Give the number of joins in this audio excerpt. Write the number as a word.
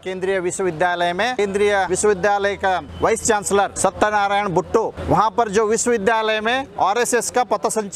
five